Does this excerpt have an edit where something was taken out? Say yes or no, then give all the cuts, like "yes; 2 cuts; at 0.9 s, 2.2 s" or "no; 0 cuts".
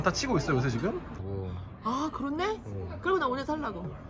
yes; 1 cut; at 1.2 s